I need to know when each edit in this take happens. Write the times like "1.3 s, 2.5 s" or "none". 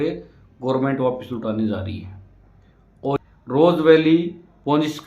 3.2 s